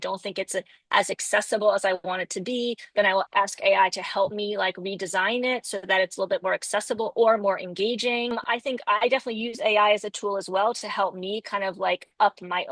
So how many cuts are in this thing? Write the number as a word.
one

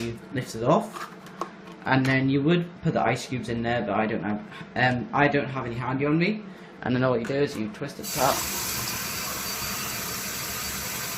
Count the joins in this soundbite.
one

